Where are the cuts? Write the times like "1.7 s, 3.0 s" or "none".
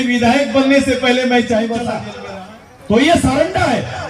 2.1 s